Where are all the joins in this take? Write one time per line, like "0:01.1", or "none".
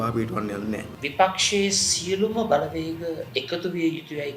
0:01.0